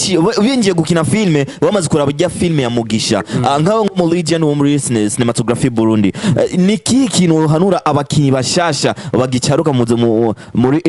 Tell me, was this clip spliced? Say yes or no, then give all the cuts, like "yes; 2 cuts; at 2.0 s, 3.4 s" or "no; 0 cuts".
no; 0 cuts